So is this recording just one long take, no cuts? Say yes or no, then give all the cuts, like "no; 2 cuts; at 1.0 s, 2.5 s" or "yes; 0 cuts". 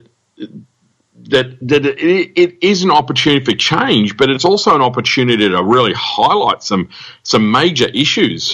yes; 0 cuts